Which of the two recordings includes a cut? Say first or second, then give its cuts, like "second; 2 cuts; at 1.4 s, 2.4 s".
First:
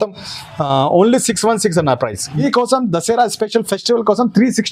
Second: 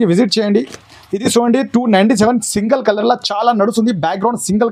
first; 1 cut; at 2.4 s